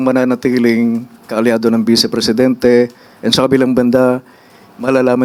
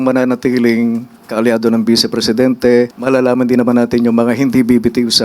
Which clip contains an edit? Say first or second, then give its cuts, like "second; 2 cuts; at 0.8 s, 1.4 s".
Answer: second; 1 cut; at 3.0 s